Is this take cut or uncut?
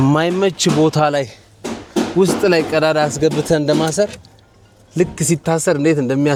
uncut